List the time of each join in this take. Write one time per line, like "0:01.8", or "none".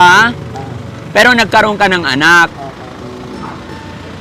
none